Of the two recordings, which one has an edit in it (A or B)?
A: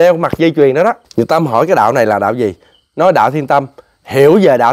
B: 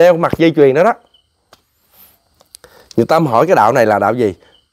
A